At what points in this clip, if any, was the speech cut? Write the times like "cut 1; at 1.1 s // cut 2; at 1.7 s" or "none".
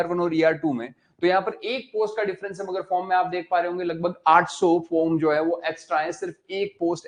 none